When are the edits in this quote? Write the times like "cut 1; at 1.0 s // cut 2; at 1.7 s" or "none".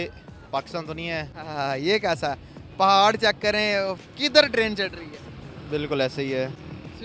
cut 1; at 1.4 s